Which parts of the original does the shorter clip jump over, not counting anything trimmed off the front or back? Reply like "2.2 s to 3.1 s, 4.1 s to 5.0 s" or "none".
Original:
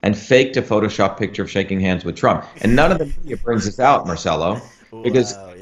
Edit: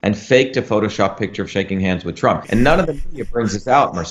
2.4 s to 2.5 s

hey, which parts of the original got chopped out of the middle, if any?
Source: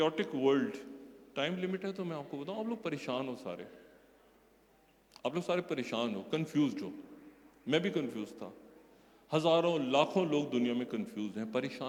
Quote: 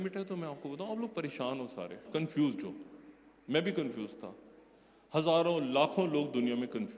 3.7 s to 6.2 s

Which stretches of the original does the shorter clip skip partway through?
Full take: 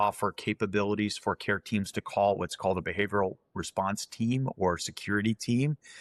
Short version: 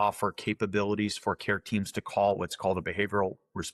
none

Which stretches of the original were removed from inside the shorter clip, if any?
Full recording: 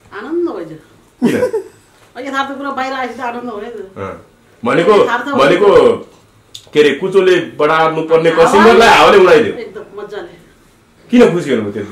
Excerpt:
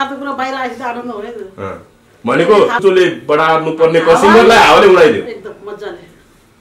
5.2 s to 7.1 s

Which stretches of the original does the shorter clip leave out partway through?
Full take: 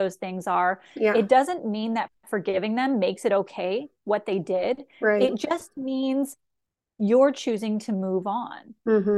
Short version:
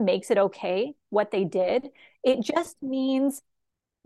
none

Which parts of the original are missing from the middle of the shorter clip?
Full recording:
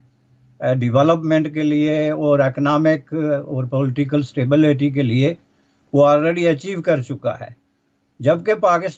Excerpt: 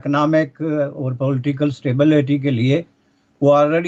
none

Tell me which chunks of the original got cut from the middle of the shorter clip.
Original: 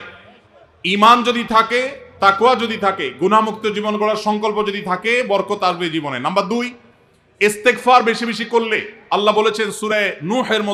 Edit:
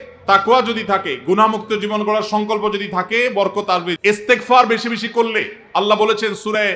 5.9 s to 7.3 s

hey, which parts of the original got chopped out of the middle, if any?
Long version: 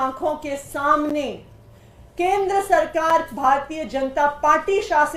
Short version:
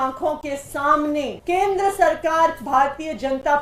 1.4 s to 2.1 s

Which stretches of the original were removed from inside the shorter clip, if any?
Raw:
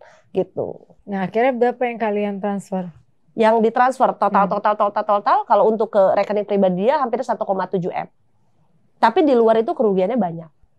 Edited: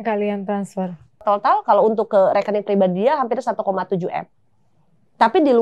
3.1 s to 5.0 s

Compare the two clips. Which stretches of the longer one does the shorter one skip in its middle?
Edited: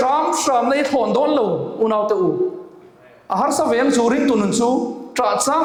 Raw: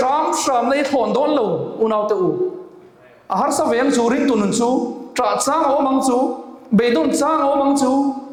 none

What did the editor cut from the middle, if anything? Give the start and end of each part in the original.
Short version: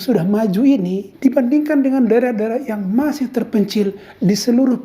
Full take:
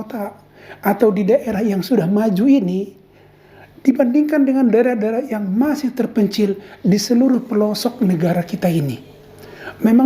2.9 s to 3.7 s

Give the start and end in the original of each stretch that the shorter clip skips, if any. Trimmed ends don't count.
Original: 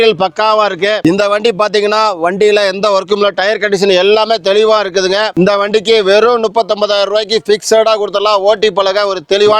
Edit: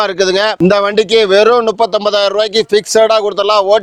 none

